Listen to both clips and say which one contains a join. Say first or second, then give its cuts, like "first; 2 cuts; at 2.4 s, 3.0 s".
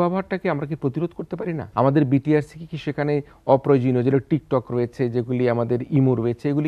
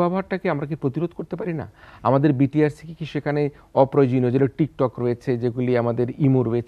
first; 1 cut; at 1.6 s